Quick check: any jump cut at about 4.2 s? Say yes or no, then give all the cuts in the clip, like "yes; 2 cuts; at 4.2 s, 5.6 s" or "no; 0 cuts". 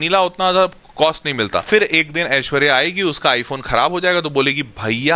no; 1 cut; at 1.6 s